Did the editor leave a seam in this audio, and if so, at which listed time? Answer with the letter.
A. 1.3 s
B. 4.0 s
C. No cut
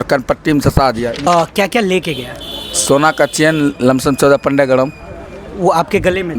A